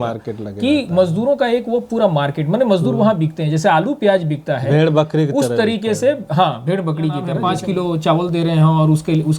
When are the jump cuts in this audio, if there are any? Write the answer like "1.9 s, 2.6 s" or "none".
7.3 s